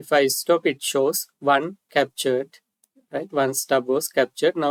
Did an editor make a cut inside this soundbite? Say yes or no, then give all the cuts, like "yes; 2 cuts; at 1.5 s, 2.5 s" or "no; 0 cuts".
no; 0 cuts